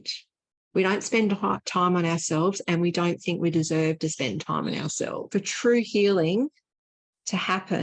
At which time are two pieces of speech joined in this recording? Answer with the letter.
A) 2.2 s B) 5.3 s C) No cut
B